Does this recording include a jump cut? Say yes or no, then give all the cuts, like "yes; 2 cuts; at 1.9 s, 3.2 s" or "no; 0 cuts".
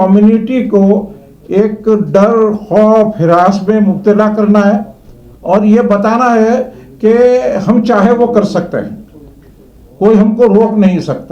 no; 0 cuts